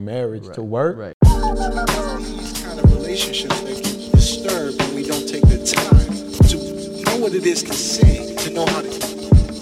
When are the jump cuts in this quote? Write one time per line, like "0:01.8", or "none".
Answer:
0:01.1